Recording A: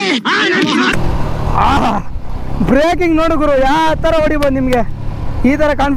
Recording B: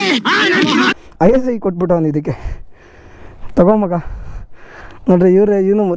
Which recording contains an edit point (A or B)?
A